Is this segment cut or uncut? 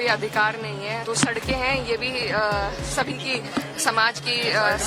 cut